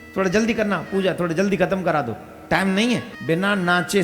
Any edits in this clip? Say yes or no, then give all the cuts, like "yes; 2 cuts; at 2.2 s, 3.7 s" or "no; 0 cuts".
yes; 1 cut; at 3.1 s